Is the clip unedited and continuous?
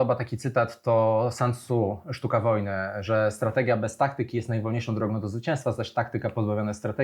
yes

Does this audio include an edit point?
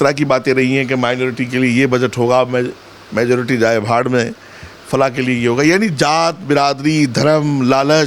no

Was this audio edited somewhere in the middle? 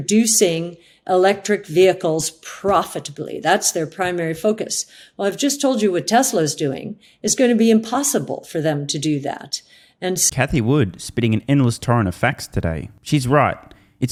no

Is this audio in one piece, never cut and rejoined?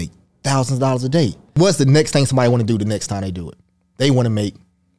no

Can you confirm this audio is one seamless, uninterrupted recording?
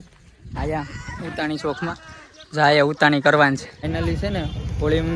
no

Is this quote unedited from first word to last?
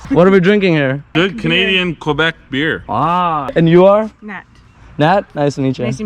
no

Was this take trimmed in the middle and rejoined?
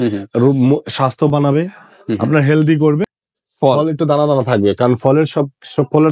yes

